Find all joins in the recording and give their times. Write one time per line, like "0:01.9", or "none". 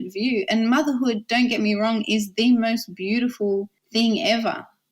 0:03.8